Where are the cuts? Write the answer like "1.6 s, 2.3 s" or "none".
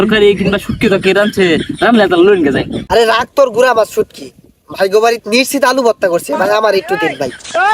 none